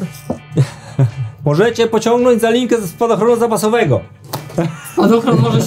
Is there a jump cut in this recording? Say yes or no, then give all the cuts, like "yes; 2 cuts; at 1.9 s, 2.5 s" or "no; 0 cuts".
yes; 1 cut; at 1.2 s